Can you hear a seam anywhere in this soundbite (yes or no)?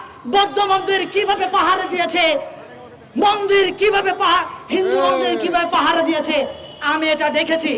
no